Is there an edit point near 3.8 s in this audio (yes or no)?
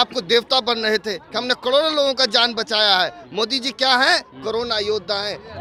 no